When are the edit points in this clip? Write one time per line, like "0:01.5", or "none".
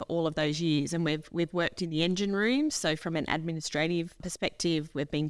0:04.3

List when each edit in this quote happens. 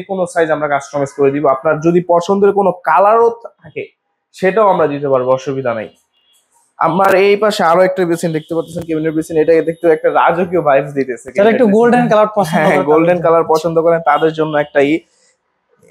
none

